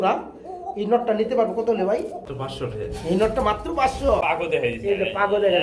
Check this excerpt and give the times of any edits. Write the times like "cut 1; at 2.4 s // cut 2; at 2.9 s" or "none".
cut 1; at 2.3 s // cut 2; at 4.2 s